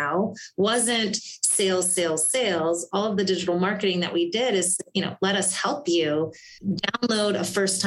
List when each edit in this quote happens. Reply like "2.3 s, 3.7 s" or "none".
6.5 s